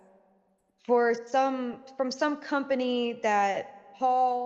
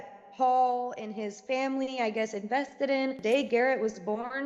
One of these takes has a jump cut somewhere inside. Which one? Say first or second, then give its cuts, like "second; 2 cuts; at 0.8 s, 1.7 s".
second; 1 cut; at 3.2 s